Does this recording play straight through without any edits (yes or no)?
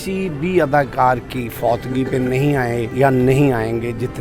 no